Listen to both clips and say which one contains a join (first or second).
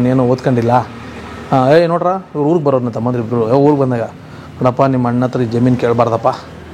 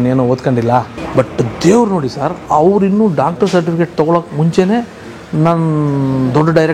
second